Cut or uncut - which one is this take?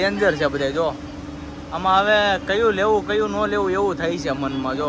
uncut